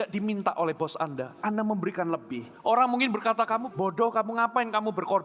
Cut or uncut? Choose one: cut